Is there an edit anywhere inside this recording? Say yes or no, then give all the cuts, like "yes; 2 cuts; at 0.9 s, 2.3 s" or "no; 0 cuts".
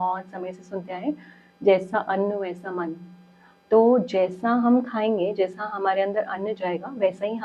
no; 0 cuts